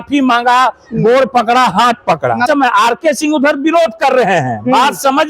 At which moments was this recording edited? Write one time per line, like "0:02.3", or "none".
0:02.5